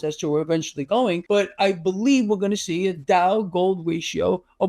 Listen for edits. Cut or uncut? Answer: cut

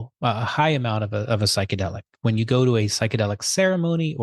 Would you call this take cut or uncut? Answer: uncut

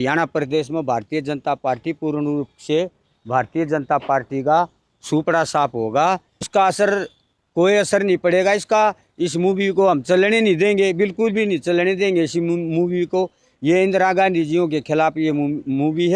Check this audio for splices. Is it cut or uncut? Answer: cut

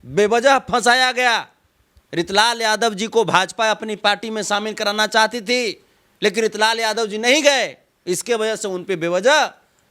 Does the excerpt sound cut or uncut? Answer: uncut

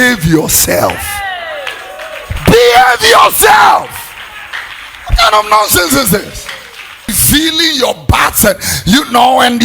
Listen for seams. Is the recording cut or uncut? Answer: cut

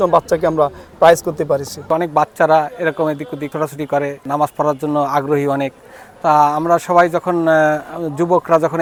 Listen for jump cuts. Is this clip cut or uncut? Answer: uncut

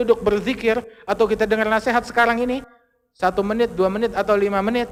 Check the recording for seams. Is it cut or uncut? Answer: uncut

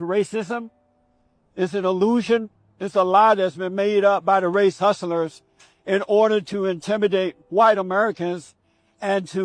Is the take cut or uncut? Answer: uncut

